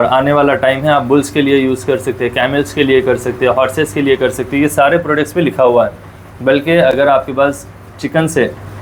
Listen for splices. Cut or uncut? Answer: uncut